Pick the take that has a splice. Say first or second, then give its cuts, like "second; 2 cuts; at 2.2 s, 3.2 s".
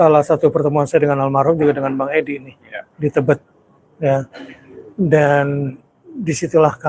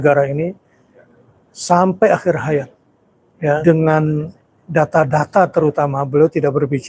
second; 1 cut; at 3.6 s